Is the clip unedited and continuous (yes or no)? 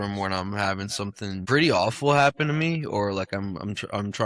no